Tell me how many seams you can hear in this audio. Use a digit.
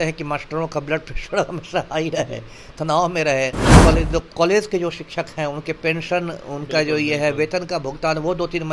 1